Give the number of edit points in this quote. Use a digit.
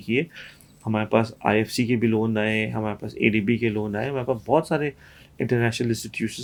0